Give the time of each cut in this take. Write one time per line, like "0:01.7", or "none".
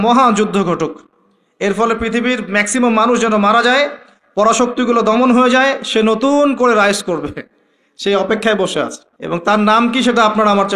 0:09.5